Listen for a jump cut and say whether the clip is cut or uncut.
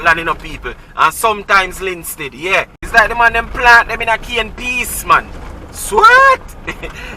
cut